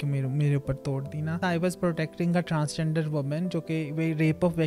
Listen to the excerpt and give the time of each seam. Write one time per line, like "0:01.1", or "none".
0:01.4